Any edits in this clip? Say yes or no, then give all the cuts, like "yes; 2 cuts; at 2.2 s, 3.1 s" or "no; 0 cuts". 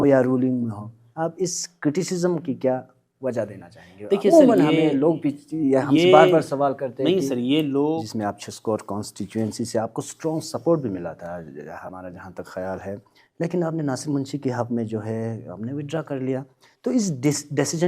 yes; 1 cut; at 8.1 s